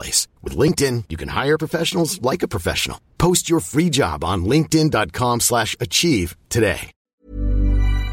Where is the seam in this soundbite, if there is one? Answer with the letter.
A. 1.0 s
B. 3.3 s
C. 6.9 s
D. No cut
C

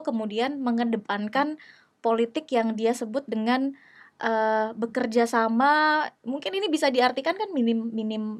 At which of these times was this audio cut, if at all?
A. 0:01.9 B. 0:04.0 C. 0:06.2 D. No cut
D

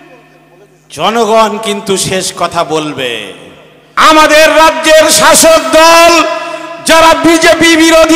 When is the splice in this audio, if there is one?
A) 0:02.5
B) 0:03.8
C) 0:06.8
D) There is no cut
B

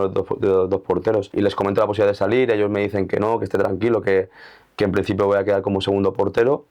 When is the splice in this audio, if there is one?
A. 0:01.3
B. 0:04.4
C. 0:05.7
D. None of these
A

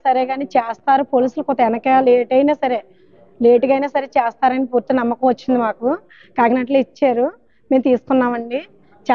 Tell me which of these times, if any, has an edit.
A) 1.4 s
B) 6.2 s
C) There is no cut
B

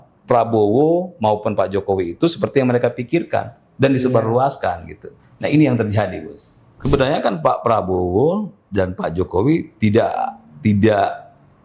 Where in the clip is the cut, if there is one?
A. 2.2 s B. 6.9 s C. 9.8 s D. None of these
B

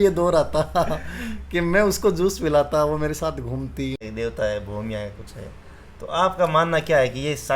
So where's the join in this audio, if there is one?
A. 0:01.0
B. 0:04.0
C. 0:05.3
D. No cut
B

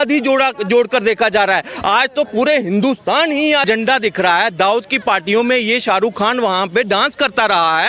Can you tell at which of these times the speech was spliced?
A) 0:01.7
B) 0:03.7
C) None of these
B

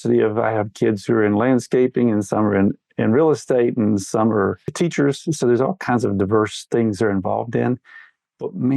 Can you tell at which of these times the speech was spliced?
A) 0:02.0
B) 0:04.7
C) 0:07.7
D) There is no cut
B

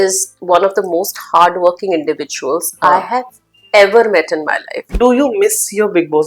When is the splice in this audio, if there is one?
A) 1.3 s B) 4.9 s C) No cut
B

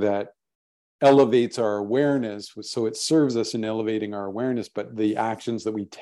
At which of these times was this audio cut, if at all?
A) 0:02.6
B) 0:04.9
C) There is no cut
C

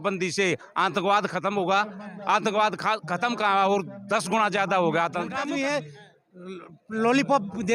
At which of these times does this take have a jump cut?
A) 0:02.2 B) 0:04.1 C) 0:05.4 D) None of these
C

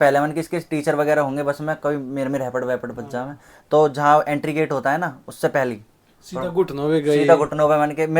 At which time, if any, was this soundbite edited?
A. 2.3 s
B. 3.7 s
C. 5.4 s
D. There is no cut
D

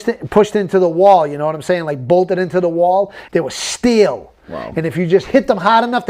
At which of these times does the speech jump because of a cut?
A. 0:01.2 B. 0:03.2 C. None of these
B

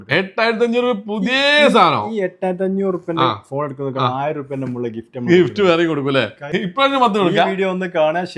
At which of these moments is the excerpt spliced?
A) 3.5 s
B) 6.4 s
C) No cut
B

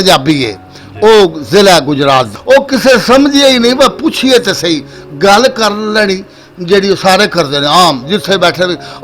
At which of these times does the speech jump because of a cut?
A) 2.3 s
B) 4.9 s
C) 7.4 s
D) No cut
A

